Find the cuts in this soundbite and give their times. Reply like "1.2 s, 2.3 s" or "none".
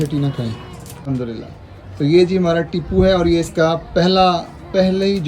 1.1 s

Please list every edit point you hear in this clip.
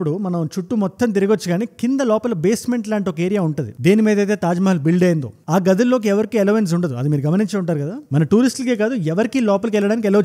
none

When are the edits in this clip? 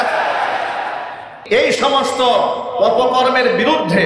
1.3 s

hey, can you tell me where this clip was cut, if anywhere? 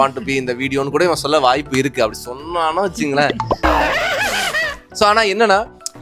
none

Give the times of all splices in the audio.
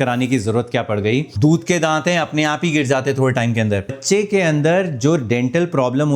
1.3 s, 4.0 s

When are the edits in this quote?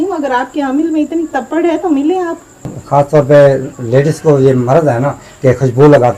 2.7 s

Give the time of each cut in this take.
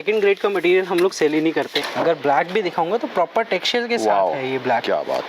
1.8 s

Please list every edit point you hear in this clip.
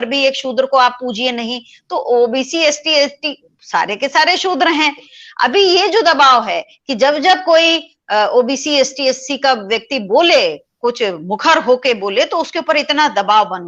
5.1 s

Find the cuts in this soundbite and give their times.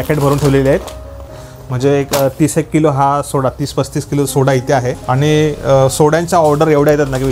1.3 s, 5.0 s

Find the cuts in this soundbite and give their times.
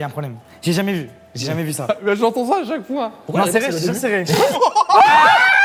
none

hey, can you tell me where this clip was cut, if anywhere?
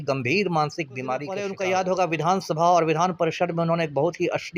1.4 s

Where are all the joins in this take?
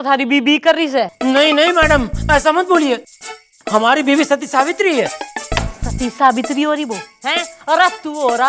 none

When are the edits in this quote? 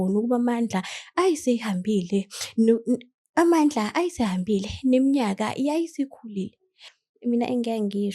6.9 s

